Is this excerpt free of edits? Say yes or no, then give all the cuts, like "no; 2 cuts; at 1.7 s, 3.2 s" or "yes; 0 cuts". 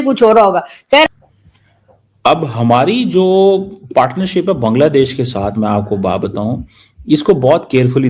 no; 1 cut; at 1.0 s